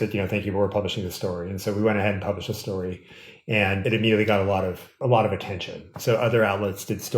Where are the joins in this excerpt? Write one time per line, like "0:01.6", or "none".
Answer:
0:03.8
0:04.9